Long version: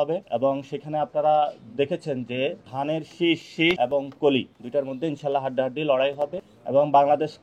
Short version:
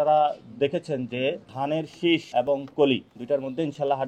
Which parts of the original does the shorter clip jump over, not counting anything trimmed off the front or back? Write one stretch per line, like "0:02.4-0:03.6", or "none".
0:03.5-0:03.8